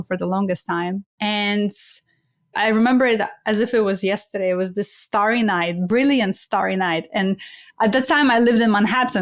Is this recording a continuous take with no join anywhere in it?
no; 2 cuts; at 1.1 s, 2.5 s

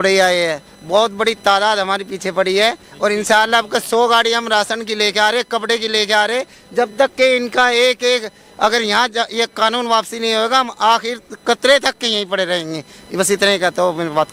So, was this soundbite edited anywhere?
no; 0 cuts

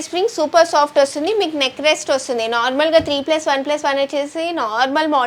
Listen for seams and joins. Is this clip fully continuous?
yes; 0 cuts

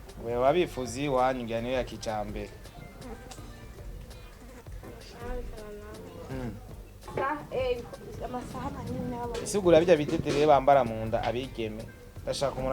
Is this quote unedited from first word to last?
no; 1 cut; at 7.1 s

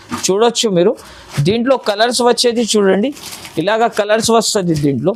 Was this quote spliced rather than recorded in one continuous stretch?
no; 0 cuts

